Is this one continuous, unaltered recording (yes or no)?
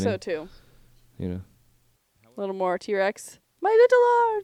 no